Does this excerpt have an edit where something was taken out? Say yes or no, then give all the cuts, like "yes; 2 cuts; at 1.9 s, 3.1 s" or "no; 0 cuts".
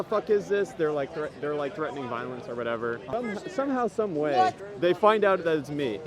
yes; 2 cuts; at 3.1 s, 4.7 s